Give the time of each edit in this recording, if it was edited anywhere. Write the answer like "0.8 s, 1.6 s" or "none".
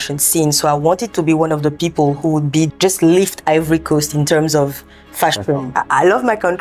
2.7 s, 5.7 s